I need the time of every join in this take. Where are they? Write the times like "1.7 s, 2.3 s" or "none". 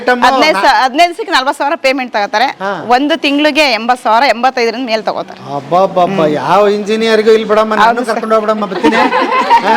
none

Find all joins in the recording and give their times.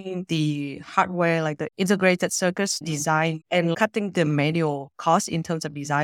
4.9 s

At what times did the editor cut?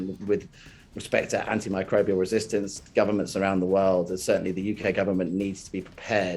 2.8 s

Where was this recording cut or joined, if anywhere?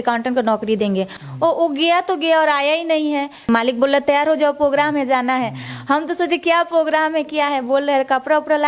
1.2 s, 3.5 s

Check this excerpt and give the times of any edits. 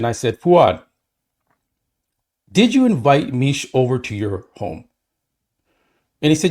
none

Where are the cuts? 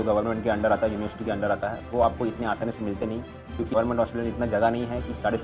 3.7 s

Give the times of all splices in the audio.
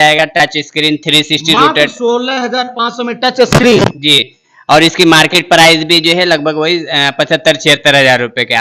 none

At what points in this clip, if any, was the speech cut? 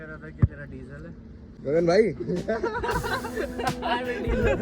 1.4 s

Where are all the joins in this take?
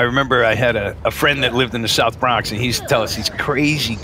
0.9 s

